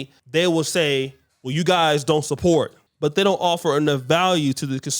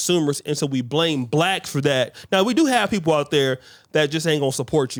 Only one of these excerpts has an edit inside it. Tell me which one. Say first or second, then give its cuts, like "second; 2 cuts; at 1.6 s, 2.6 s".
first; 1 cut; at 2.8 s